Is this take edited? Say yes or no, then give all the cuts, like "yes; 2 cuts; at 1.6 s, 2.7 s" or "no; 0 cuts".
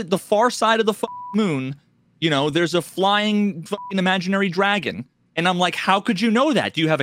no; 0 cuts